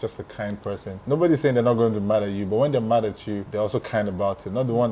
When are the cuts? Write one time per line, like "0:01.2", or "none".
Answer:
0:01.0
0:03.5